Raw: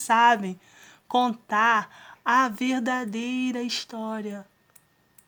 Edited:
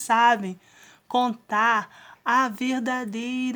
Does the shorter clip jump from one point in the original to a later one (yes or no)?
no